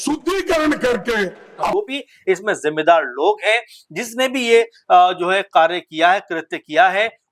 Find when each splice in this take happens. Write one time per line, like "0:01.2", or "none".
0:01.7